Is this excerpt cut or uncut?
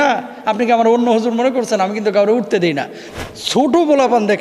cut